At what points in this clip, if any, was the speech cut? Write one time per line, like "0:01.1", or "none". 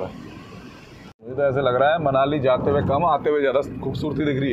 0:01.1